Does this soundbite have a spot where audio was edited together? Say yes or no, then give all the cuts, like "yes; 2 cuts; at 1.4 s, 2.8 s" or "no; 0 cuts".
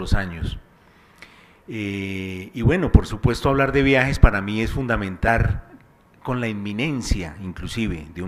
no; 0 cuts